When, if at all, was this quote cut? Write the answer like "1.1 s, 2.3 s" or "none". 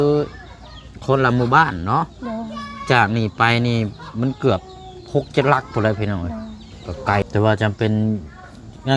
7.2 s